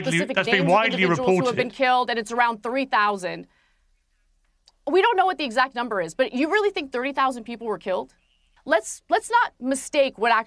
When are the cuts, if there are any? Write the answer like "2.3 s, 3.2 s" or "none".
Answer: 8.7 s